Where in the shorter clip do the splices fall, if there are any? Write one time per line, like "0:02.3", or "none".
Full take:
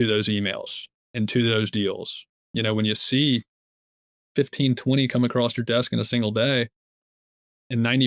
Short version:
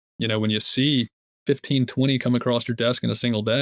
0:01.2